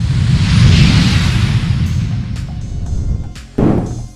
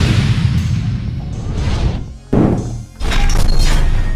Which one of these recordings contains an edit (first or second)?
second